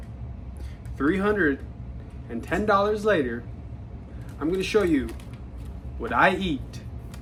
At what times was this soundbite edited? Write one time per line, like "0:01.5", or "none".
none